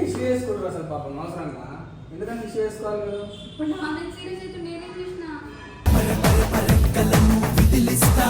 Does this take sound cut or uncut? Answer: uncut